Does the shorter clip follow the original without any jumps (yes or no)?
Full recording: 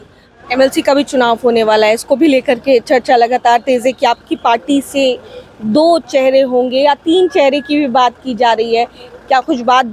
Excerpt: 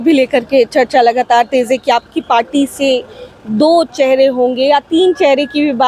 yes